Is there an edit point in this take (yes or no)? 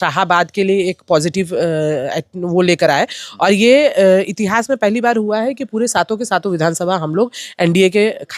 no